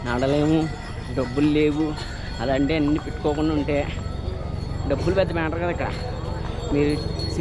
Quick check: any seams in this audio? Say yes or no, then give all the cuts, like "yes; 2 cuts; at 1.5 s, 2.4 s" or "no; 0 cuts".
no; 0 cuts